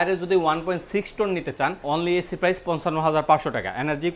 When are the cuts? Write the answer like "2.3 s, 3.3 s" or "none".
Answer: 1.8 s

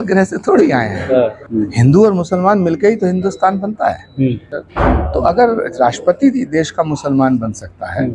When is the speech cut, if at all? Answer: 1.4 s, 4.5 s

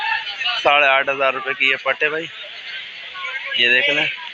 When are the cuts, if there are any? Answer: none

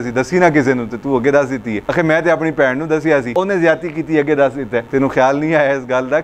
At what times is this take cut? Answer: 1.8 s, 3.3 s, 4.8 s

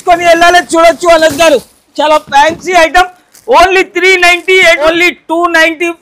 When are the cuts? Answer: 4.8 s

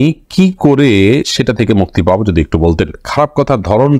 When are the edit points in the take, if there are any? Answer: none

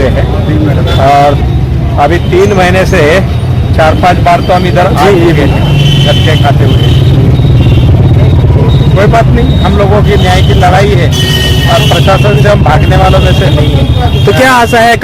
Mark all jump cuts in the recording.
none

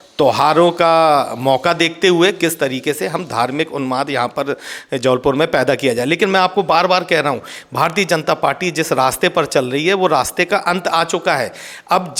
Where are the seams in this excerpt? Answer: none

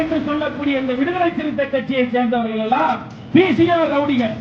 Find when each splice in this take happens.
3.1 s

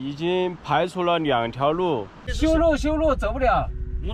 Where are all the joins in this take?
2.2 s

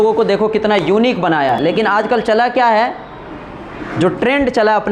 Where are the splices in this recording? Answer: 1.6 s

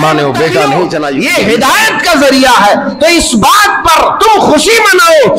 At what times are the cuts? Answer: 1.2 s

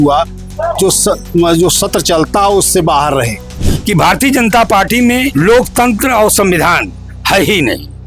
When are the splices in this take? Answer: 3.7 s, 5.3 s

